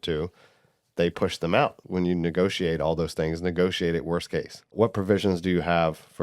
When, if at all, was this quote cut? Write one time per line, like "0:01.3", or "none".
0:01.8
0:04.7